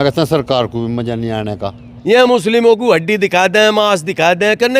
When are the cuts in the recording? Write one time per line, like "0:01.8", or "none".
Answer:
0:01.9